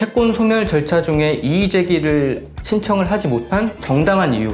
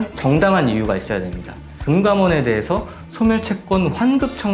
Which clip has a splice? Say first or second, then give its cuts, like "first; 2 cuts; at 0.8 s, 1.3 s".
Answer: second; 1 cut; at 1.8 s